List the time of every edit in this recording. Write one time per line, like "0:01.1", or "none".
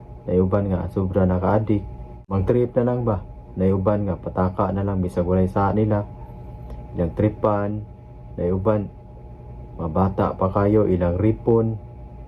0:02.3